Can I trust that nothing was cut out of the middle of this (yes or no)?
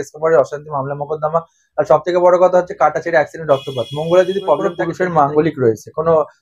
no